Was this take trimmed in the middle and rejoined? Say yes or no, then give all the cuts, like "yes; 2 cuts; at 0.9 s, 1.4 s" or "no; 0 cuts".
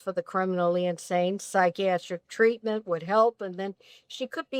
no; 0 cuts